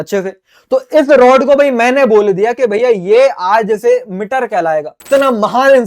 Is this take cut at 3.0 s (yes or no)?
no